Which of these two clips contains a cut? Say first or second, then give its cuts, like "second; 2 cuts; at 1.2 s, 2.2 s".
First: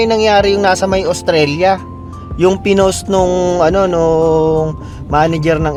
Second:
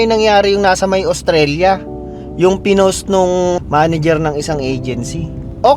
second; 1 cut; at 3.5 s